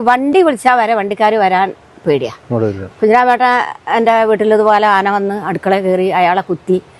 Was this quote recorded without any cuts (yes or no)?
no